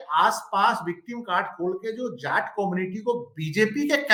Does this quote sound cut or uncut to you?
uncut